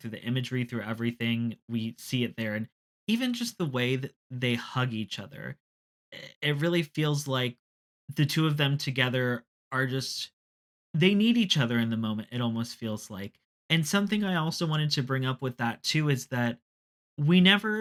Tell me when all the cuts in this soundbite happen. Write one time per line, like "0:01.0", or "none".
none